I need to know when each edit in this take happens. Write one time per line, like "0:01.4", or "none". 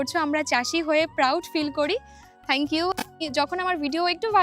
0:03.1